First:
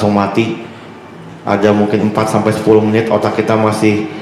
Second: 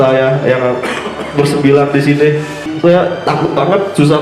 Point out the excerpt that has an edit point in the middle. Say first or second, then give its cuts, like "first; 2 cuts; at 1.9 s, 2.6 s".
second; 1 cut; at 2.7 s